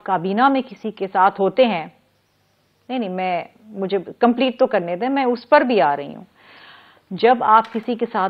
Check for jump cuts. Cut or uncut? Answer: uncut